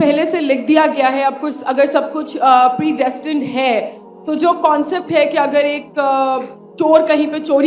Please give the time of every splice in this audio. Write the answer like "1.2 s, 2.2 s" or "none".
none